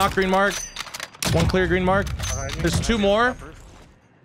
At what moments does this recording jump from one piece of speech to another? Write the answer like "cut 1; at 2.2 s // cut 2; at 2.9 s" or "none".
none